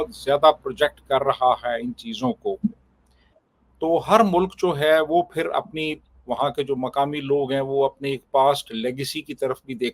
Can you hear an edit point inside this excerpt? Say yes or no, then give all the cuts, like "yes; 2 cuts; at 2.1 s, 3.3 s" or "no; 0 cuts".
no; 0 cuts